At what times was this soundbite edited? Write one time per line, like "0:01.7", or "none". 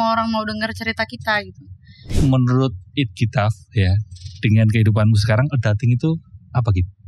0:02.1

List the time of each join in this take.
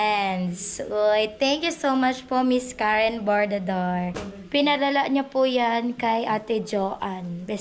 0:04.3

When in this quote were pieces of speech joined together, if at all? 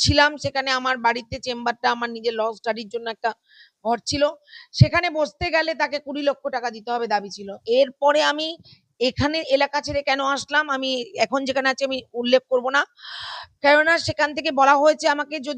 0:07.5

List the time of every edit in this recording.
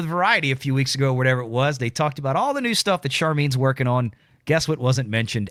none

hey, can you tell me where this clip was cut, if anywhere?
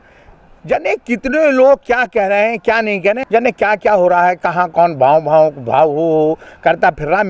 0:03.2

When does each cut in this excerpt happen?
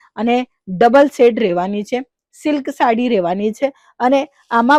none

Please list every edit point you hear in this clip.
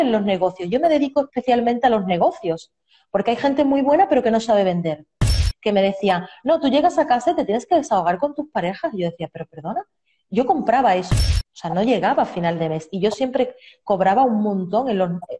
0:05.3
0:11.1

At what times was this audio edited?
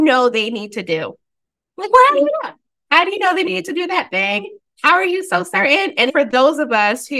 0:06.1

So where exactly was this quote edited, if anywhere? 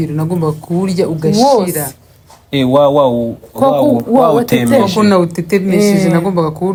none

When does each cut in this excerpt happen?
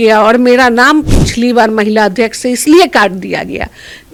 none

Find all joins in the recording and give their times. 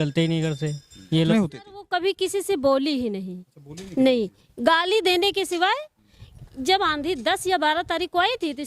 0:01.3

